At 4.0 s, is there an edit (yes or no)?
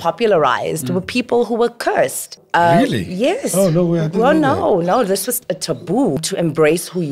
no